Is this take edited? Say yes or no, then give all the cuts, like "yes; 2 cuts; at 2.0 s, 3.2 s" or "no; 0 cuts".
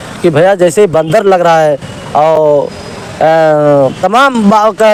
no; 0 cuts